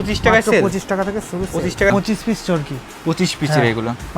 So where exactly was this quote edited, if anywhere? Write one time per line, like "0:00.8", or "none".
0:01.9